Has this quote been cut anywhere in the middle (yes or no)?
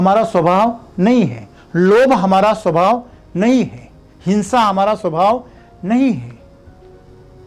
no